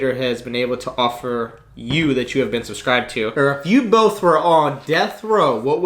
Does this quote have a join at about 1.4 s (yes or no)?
no